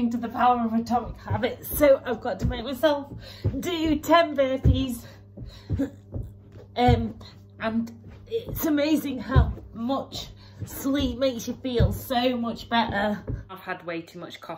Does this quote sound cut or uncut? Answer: cut